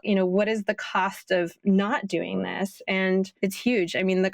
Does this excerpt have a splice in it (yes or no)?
yes